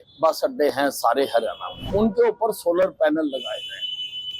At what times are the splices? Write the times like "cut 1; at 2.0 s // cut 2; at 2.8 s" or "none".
cut 1; at 1.7 s